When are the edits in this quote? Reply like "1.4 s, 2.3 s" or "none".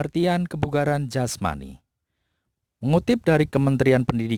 none